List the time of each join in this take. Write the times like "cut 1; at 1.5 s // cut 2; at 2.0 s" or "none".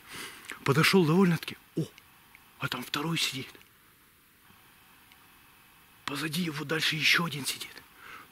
none